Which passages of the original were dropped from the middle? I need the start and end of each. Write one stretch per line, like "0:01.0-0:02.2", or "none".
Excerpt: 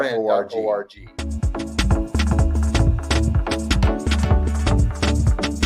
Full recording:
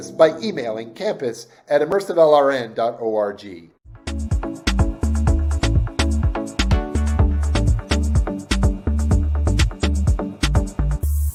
0:03.5-0:03.9